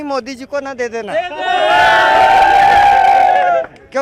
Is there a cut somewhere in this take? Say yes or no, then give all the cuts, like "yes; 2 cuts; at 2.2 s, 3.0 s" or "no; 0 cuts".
no; 0 cuts